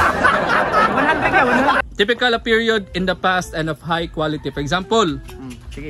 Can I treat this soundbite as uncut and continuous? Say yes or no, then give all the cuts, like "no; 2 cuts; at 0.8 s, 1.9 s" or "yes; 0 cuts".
no; 1 cut; at 1.8 s